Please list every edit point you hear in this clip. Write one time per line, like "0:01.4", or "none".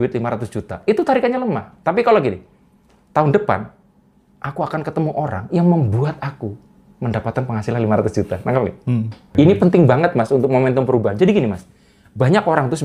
0:09.2